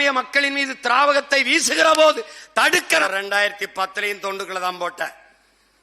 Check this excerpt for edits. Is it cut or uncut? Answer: cut